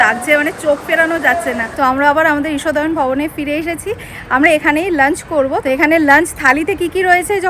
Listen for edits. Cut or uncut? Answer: cut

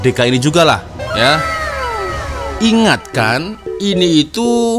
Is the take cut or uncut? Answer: cut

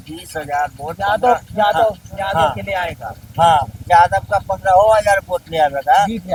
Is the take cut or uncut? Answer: uncut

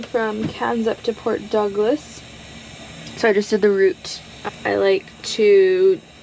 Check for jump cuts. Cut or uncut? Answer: uncut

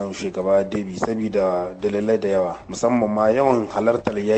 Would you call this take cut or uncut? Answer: cut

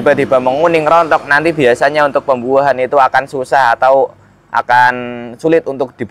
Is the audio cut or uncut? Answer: uncut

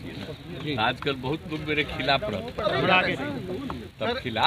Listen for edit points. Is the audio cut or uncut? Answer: uncut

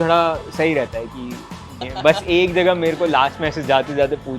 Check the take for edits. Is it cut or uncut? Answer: cut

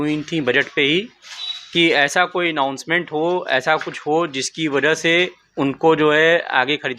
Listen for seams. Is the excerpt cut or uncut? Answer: uncut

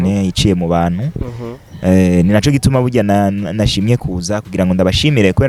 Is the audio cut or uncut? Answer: uncut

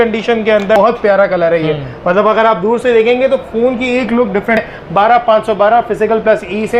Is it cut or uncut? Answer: cut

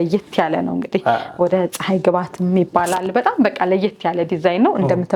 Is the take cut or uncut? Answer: uncut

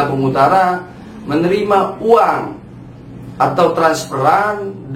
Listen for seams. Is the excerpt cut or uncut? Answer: uncut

